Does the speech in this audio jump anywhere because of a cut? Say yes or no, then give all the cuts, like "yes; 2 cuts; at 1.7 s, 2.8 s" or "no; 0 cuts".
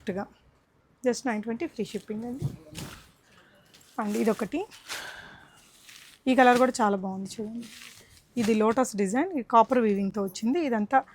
no; 0 cuts